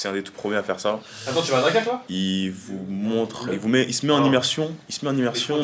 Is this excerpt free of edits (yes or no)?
yes